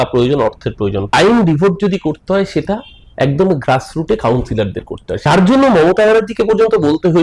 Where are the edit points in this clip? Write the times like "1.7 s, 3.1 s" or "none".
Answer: 1.1 s, 5.3 s